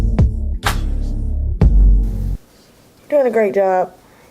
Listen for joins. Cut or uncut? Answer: uncut